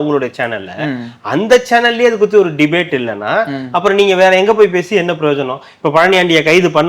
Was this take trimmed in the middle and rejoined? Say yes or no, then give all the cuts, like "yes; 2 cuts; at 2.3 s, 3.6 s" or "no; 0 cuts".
no; 0 cuts